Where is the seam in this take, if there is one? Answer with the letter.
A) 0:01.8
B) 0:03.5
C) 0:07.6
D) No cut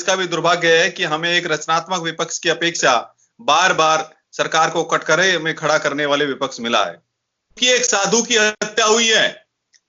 C